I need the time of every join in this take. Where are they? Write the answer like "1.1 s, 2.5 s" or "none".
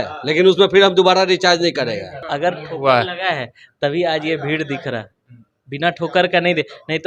2.1 s